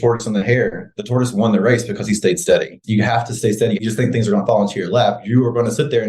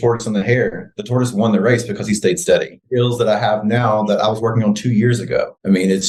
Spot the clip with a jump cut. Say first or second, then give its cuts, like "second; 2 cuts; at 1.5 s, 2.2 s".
first; 2 cuts; at 2.8 s, 3.8 s